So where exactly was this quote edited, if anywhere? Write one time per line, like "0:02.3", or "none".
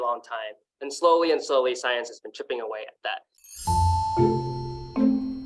0:03.3